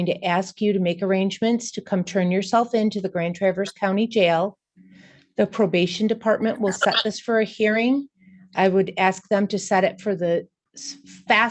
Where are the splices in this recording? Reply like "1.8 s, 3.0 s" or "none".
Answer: none